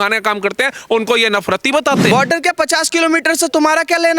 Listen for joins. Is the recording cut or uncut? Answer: cut